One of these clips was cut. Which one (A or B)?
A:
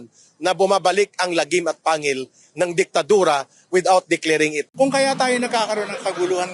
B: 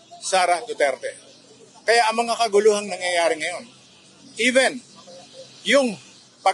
A